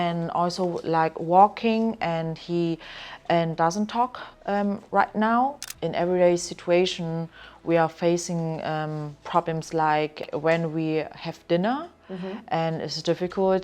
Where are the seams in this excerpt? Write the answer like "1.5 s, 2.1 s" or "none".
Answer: 5.6 s, 10.2 s